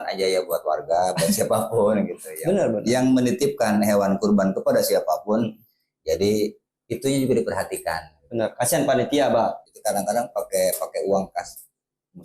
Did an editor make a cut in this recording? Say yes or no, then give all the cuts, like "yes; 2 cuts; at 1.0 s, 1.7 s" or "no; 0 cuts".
yes; 1 cut; at 9.7 s